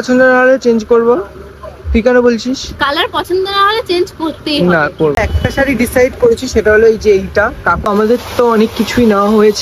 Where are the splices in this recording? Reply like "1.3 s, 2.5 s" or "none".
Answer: 5.1 s, 7.9 s